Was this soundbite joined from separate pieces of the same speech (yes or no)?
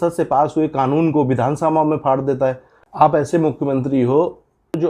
yes